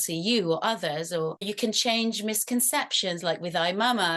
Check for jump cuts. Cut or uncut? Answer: cut